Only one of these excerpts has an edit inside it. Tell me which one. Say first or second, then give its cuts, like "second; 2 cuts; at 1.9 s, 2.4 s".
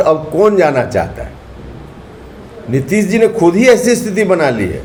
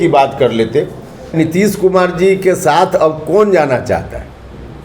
second; 1 cut; at 1.4 s